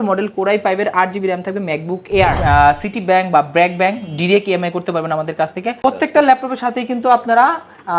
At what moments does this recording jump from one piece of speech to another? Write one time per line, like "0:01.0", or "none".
0:02.4
0:05.8

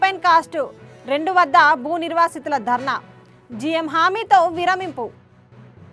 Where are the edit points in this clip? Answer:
none

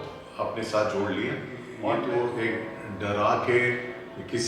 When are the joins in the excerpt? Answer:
0:01.7

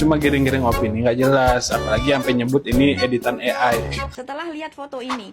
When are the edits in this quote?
0:04.1

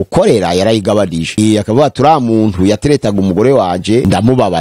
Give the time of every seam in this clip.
0:01.4

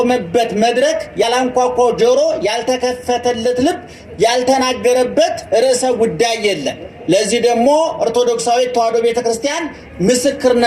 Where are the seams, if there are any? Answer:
0:01.3

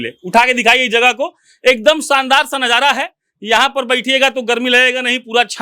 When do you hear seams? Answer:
none

